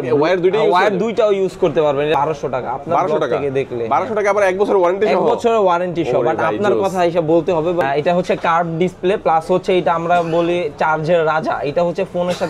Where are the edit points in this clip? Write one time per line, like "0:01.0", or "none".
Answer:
0:02.1
0:07.8